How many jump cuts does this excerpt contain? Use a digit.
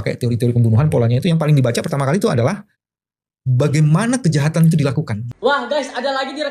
1